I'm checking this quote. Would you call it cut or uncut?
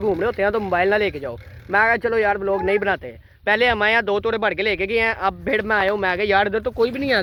uncut